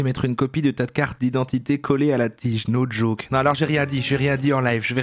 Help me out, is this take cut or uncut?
uncut